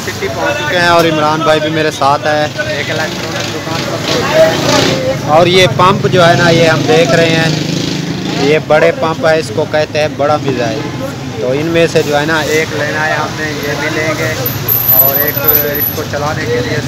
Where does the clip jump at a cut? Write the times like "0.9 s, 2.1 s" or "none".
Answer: none